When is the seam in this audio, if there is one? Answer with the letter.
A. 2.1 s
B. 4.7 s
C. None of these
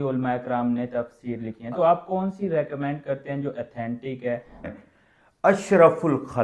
B